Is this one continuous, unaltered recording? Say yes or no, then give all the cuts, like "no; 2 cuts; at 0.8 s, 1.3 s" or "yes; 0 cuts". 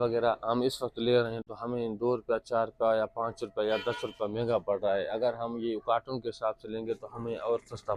yes; 0 cuts